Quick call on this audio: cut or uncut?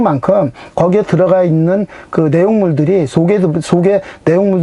uncut